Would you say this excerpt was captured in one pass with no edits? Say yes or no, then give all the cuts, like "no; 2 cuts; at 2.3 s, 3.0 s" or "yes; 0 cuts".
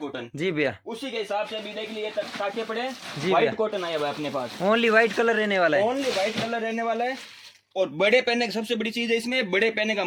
yes; 0 cuts